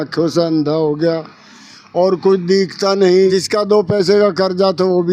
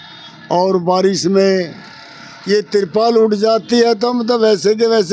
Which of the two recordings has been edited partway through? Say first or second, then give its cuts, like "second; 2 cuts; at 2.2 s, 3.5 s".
first; 1 cut; at 3.3 s